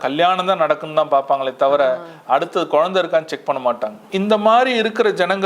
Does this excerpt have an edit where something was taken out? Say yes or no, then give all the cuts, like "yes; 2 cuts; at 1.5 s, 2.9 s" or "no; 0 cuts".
yes; 1 cut; at 4.0 s